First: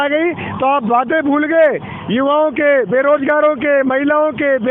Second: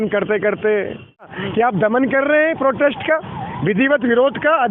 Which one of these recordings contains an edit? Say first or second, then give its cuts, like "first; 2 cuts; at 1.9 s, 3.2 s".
second; 1 cut; at 1.4 s